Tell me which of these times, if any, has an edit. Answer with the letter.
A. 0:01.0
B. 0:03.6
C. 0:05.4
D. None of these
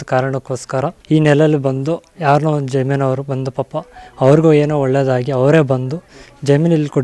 A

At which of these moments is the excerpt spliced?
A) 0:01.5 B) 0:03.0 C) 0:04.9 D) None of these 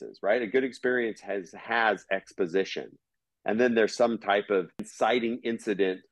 C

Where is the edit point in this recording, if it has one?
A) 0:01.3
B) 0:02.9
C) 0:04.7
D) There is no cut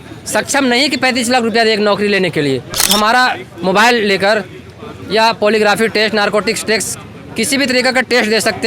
B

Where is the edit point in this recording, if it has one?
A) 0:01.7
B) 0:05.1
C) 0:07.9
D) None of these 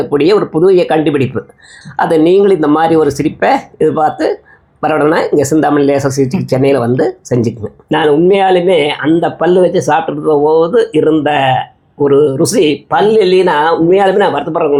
D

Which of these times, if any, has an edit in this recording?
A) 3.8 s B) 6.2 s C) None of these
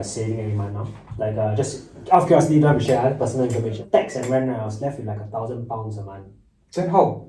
A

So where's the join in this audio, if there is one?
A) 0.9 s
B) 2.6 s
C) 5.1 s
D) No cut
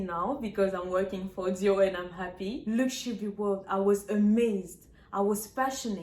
B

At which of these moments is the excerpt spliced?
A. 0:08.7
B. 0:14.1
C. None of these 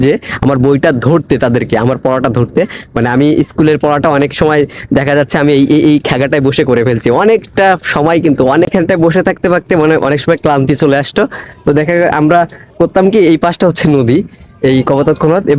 A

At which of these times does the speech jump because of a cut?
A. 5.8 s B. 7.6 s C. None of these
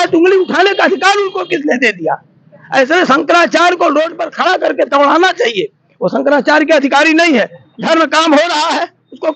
B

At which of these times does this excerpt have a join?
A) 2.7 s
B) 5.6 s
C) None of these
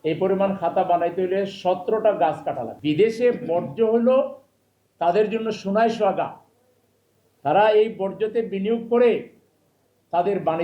A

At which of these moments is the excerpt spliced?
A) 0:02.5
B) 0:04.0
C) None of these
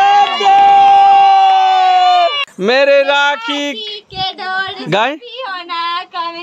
A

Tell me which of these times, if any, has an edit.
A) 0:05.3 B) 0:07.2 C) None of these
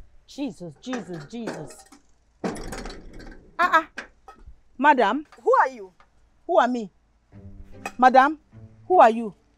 A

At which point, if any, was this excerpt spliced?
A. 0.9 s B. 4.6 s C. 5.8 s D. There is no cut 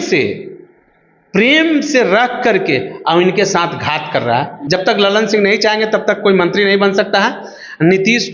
B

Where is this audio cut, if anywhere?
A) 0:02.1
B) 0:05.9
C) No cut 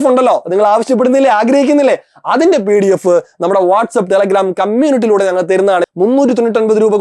B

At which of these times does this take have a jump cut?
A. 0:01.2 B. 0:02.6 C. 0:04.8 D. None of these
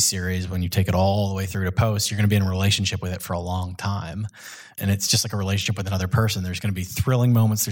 C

